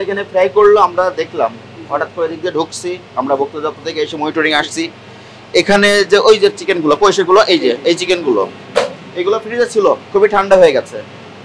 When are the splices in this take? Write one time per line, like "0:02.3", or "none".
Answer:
none